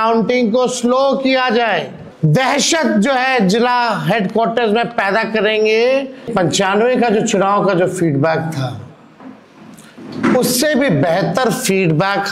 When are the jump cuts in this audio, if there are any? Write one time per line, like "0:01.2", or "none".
0:02.0
0:06.3